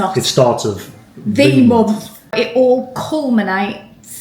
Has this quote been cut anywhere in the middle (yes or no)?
yes